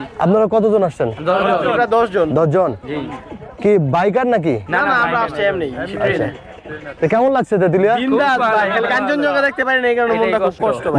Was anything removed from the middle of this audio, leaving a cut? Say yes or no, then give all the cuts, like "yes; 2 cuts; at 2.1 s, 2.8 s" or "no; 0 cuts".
no; 0 cuts